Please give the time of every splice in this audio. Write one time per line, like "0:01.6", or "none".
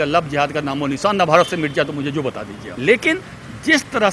0:02.8